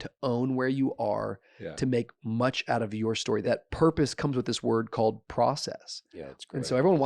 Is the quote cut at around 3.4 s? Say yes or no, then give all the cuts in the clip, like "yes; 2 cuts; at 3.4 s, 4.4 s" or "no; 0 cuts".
yes; 1 cut; at 3.4 s